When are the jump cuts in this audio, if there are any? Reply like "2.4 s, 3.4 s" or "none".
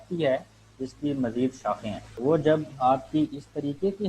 2.0 s